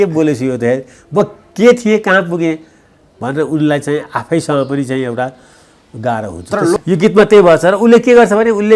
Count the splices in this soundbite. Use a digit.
1